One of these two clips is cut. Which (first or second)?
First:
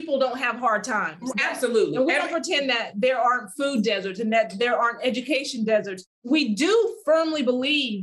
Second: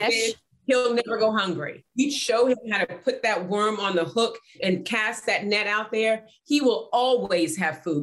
second